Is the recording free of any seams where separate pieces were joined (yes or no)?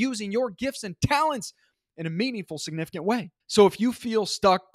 no